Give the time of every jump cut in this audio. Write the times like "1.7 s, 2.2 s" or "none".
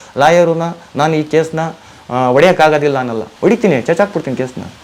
3.2 s